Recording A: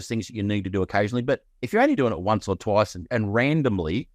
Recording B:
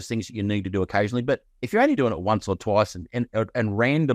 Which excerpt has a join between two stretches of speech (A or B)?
A